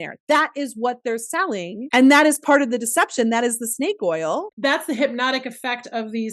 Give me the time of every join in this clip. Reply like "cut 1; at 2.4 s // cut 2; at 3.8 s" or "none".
cut 1; at 4.5 s

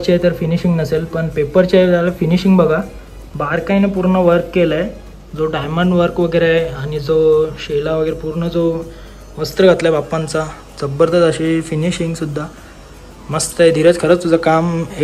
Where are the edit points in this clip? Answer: none

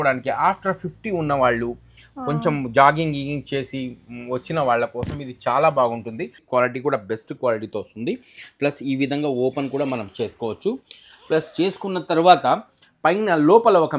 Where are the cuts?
cut 1; at 6.3 s

